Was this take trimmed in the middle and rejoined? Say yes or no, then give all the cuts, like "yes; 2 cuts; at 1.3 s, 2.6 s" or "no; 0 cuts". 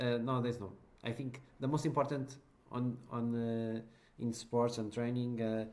no; 0 cuts